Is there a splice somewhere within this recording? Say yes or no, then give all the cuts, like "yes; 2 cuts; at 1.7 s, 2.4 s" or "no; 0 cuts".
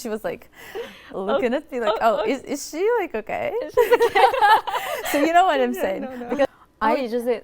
yes; 1 cut; at 6.5 s